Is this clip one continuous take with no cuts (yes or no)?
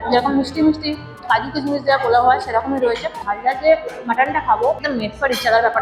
no